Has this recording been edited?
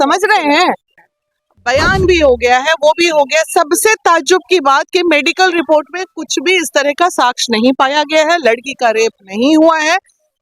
yes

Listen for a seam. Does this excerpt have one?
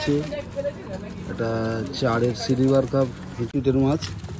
yes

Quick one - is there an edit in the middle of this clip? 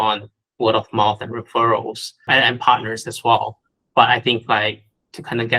yes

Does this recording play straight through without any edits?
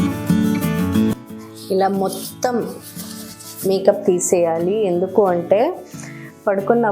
no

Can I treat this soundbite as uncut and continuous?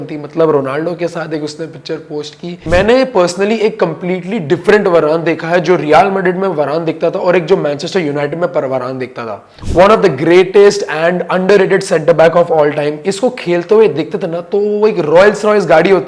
no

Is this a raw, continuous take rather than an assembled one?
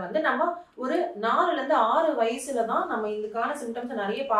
yes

